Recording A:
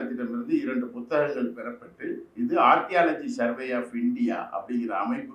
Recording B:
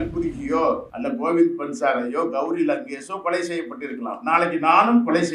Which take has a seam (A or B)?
B